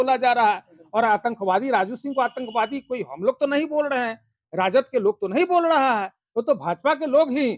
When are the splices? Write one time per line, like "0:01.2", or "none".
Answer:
none